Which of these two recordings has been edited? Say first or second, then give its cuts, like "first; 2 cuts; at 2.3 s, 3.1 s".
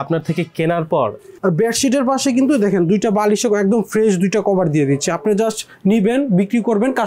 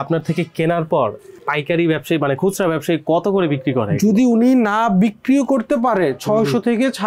first; 1 cut; at 1.3 s